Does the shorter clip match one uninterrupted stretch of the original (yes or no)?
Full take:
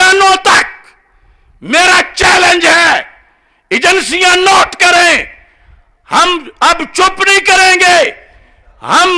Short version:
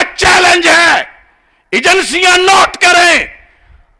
yes